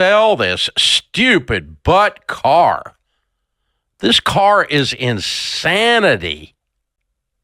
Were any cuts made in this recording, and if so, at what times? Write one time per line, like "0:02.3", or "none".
none